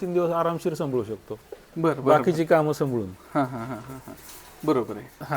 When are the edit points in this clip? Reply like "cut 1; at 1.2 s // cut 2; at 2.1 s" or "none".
none